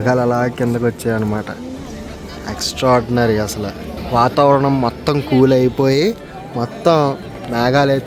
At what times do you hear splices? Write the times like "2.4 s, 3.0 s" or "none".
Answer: 3.9 s